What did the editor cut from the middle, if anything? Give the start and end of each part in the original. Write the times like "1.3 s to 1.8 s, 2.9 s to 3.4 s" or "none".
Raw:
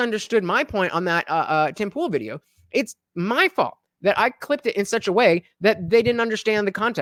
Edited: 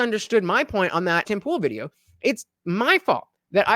1.2 s to 1.7 s